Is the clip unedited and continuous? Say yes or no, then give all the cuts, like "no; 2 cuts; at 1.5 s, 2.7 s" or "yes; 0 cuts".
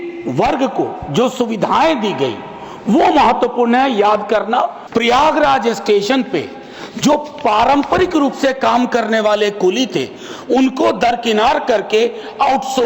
no; 1 cut; at 4.8 s